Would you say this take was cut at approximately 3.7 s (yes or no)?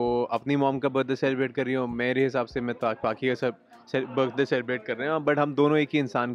no